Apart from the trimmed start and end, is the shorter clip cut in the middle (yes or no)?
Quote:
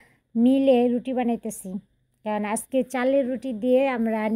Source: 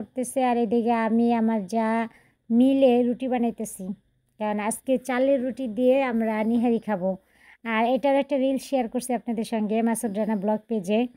no